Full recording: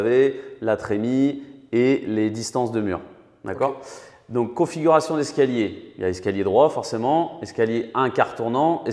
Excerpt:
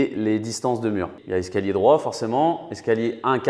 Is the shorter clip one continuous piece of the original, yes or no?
no